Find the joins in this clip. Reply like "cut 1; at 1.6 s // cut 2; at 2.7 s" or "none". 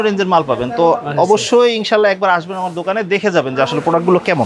none